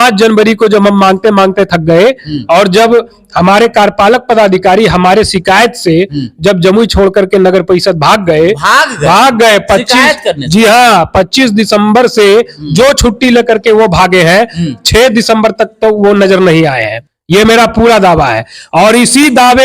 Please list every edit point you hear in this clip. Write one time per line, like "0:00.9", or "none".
0:17.0